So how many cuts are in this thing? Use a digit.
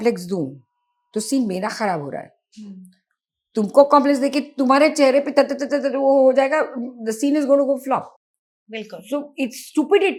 0